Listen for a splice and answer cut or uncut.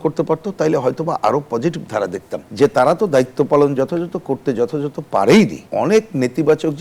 cut